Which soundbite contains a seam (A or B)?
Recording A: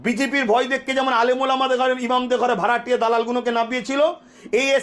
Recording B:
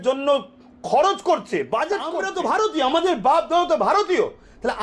B